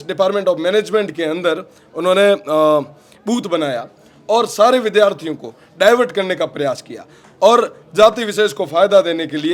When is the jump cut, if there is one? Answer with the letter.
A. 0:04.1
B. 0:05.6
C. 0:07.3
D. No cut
D